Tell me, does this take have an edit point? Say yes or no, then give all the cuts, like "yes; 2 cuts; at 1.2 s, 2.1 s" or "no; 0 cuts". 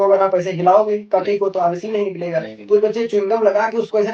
no; 0 cuts